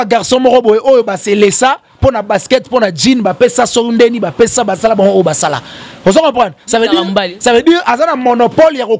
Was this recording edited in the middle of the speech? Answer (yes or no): no